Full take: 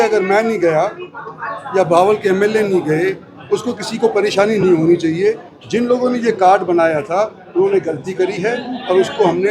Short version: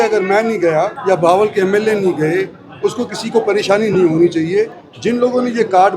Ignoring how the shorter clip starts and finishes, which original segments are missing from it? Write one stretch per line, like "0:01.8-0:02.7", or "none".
0:01.0-0:01.6